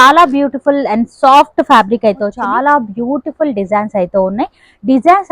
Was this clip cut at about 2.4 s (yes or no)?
yes